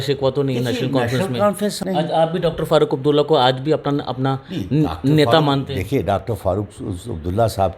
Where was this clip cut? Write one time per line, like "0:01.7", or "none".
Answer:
0:01.8